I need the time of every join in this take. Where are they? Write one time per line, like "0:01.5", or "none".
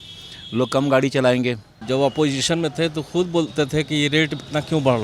0:01.7